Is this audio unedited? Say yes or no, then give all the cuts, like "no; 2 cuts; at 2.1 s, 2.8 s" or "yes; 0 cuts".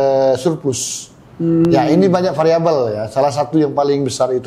yes; 0 cuts